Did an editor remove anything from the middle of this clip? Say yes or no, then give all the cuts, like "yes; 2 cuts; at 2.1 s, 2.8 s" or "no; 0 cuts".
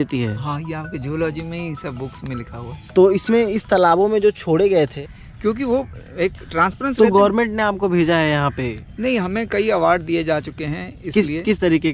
yes; 1 cut; at 5.0 s